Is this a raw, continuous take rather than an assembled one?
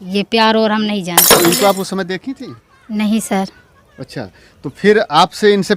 no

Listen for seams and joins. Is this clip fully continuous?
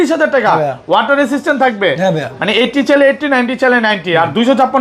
yes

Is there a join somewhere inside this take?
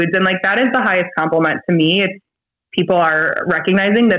yes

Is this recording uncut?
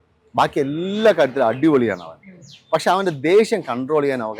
yes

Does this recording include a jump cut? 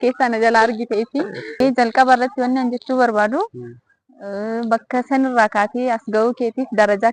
yes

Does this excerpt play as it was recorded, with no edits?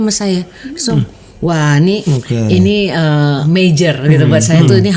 no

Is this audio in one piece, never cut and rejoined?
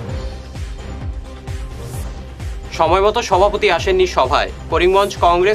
no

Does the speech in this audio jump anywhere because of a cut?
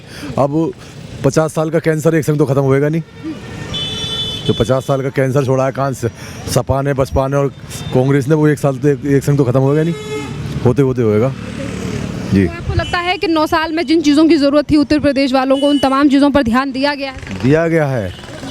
no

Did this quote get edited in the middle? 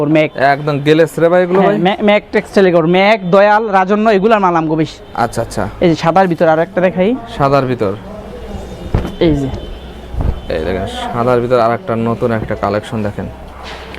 no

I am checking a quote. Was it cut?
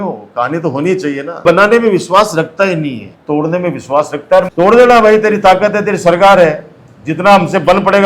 yes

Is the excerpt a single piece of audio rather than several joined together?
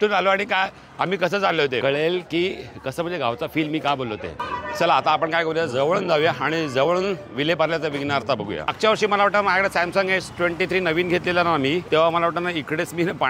no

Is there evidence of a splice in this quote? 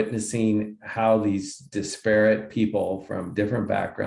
no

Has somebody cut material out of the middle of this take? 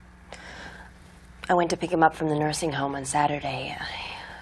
no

